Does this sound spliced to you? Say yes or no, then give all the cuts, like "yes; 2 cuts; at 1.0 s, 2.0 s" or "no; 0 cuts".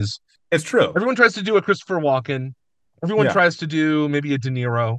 no; 0 cuts